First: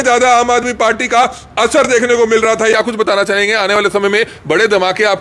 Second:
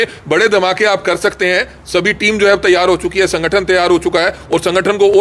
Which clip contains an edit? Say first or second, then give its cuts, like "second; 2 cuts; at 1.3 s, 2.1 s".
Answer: first; 1 cut; at 2.7 s